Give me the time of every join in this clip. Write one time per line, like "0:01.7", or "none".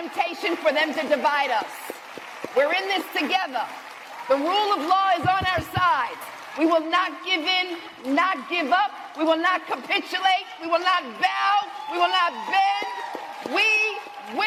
none

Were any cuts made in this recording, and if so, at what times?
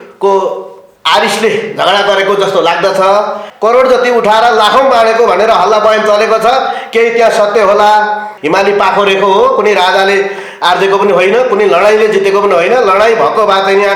0:03.4
0:08.3

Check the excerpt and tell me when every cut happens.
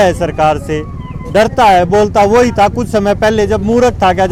none

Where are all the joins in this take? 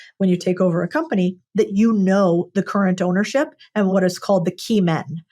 0:03.9

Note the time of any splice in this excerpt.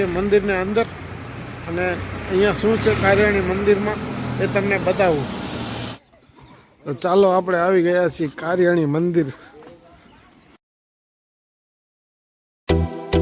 none

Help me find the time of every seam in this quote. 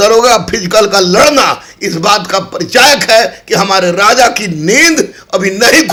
none

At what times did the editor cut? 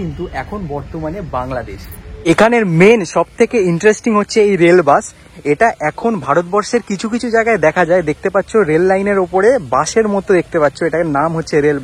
0:02.1

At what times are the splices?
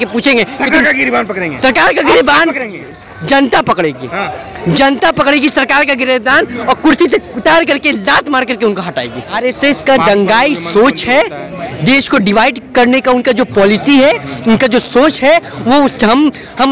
0:09.4

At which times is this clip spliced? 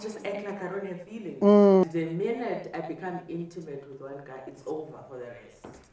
0:01.8

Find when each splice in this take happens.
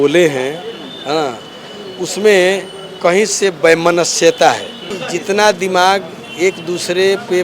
0:05.0

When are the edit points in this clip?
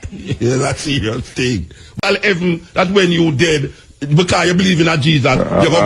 0:02.0

